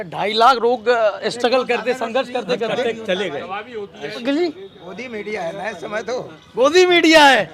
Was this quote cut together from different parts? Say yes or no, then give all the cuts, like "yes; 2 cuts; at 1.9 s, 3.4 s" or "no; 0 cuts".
yes; 1 cut; at 4.2 s